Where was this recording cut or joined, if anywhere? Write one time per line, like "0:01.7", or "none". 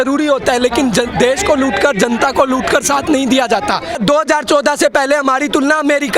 0:04.0